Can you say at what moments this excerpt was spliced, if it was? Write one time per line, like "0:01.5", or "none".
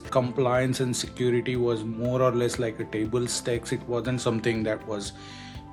none